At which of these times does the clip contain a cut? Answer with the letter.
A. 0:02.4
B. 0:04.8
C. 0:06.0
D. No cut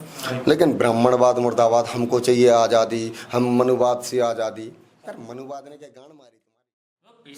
D